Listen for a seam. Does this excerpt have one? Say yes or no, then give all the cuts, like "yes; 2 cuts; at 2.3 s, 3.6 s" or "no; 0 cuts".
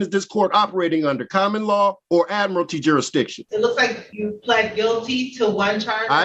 yes; 3 cuts; at 2.0 s, 3.4 s, 4.0 s